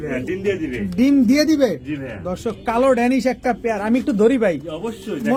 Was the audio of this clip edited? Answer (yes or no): no